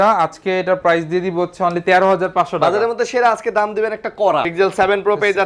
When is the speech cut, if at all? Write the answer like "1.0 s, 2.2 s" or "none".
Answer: 4.5 s